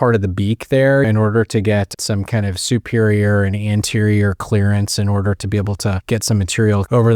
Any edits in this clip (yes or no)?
yes